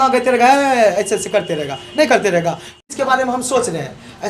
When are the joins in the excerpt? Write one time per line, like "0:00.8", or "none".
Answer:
0:02.7